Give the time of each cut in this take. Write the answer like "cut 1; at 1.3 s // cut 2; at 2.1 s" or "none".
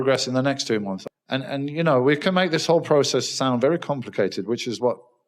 cut 1; at 1.0 s